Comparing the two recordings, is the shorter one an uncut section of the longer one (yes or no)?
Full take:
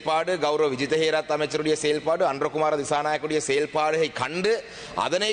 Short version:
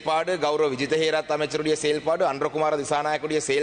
yes